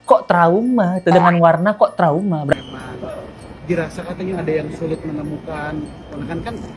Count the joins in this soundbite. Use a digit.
1